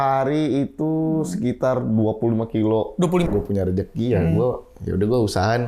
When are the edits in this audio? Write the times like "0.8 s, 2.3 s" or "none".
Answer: 3.3 s

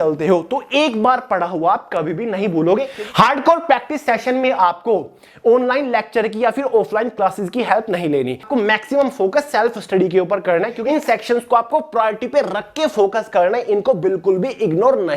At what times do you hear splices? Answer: 2.9 s, 8.4 s, 10.8 s

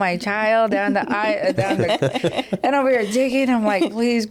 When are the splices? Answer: none

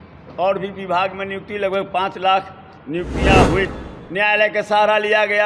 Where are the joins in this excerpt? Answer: 3.7 s

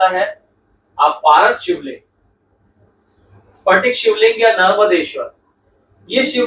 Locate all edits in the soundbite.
none

